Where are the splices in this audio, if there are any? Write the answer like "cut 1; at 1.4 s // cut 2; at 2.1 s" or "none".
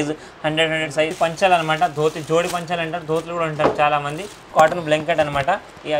cut 1; at 1.1 s // cut 2; at 4.4 s